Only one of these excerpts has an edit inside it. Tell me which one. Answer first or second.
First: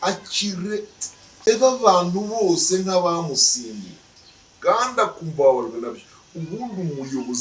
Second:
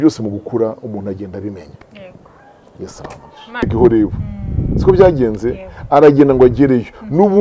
second